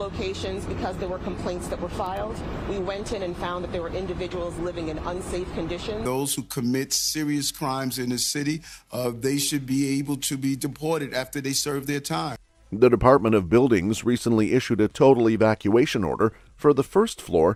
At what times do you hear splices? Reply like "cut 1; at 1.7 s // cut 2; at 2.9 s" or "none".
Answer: none

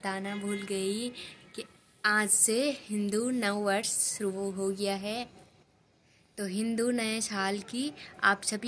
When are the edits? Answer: none

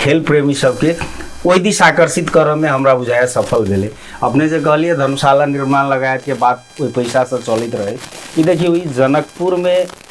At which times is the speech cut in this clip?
none

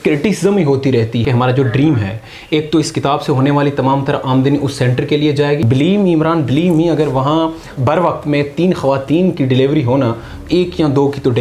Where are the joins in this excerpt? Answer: cut 1; at 1.2 s // cut 2; at 5.6 s // cut 3; at 7.7 s // cut 4; at 10.3 s

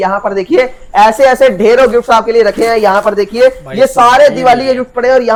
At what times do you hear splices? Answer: none

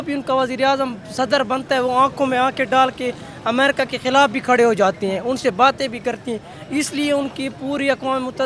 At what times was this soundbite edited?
none

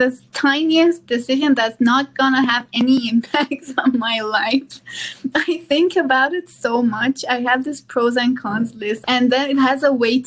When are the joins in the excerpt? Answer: cut 1; at 9.0 s

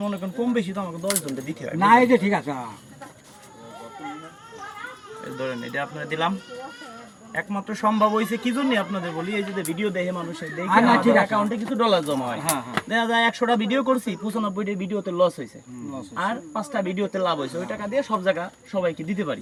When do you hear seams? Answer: none

